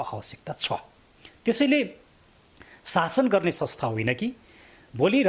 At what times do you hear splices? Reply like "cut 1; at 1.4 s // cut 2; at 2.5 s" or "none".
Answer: none